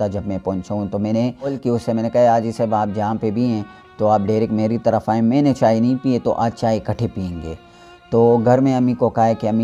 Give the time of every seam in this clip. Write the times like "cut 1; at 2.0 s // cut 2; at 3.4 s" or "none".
cut 1; at 1.6 s

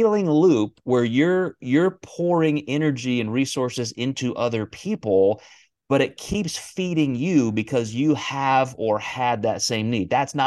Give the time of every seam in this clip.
none

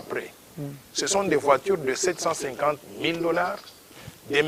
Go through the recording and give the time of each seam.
none

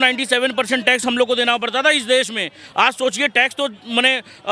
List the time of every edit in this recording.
none

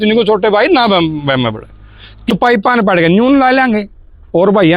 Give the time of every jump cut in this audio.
cut 1; at 2.4 s

